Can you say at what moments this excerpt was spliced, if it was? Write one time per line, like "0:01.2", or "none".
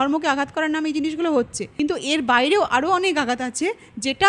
0:01.6